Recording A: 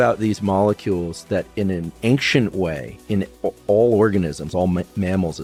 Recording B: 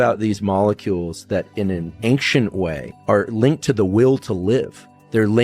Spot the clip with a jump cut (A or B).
B